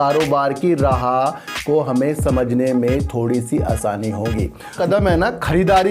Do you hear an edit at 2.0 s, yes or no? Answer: no